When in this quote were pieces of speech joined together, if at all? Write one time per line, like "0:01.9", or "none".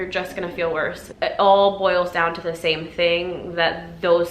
0:01.1